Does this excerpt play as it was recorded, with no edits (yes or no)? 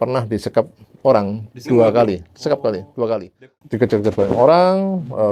no